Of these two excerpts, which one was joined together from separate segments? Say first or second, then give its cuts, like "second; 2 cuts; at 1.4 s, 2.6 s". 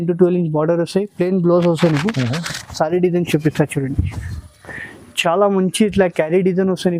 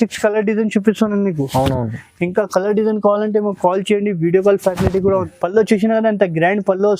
second; 1 cut; at 5.3 s